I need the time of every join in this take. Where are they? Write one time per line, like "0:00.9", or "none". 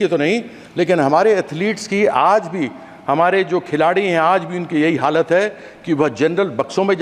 none

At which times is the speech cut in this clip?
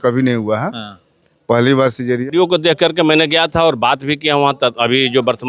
0:02.3

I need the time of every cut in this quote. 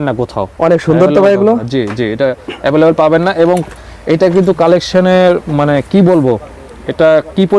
none

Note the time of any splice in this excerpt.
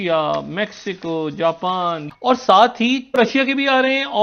0:02.0
0:03.2

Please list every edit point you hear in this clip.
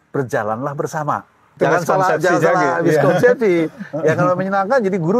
0:01.5

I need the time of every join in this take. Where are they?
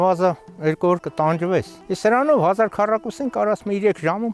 0:01.8

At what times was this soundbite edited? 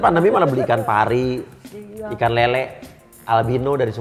none

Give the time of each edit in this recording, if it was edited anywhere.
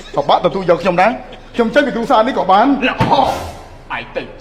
none

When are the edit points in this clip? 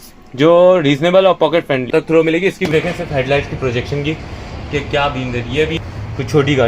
0:01.9
0:02.7
0:05.8

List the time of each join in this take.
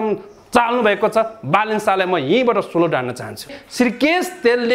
0:03.6

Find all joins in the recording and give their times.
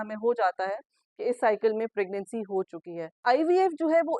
0:03.2

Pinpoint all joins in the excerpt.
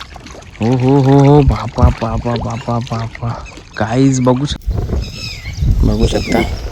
0:04.6

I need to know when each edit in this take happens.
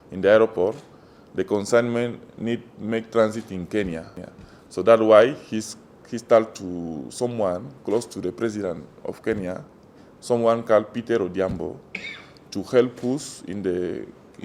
0:04.2

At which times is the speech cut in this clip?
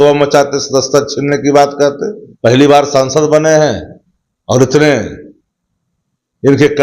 0:02.2

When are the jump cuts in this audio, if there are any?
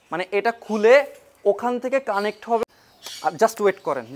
0:02.6

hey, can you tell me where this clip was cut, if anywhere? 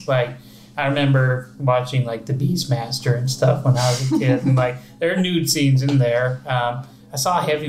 none

